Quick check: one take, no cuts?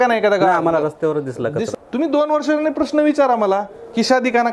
no; 1 cut; at 1.7 s

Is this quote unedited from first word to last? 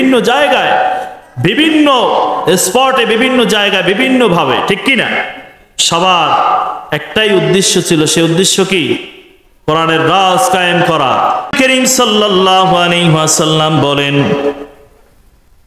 no; 1 cut; at 11.5 s

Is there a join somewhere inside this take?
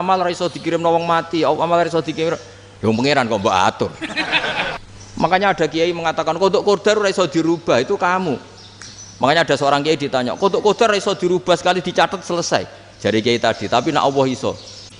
yes; 1 cut; at 4.8 s

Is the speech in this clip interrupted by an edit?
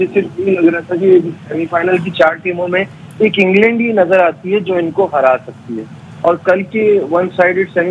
no; 0 cuts

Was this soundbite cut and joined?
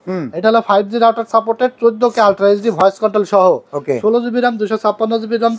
no; 0 cuts

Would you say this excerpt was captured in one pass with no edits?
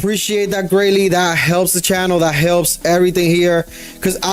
yes; 0 cuts

